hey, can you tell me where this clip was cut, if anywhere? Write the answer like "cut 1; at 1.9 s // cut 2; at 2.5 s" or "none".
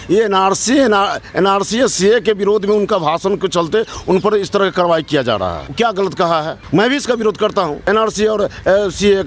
cut 1; at 5.6 s // cut 2; at 6.6 s // cut 3; at 7.8 s